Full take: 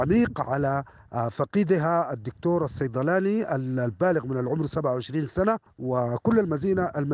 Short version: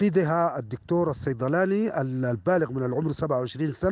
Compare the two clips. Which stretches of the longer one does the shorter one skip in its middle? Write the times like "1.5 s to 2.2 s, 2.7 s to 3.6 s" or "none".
none